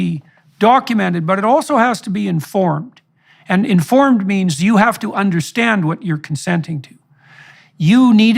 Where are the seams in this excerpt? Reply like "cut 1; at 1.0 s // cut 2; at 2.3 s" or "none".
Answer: cut 1; at 7.5 s